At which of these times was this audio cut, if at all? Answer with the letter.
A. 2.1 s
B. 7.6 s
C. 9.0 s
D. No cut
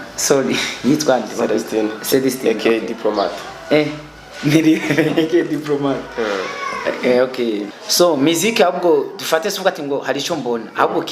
B